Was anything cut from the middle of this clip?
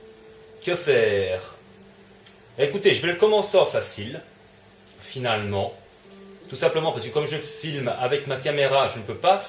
no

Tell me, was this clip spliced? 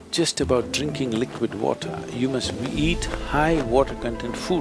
no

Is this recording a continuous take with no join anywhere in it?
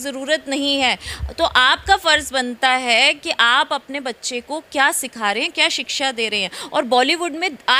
yes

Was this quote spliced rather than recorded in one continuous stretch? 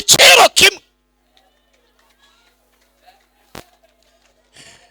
no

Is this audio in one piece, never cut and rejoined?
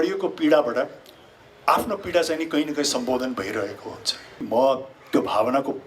no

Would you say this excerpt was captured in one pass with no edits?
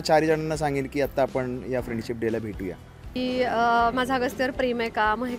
no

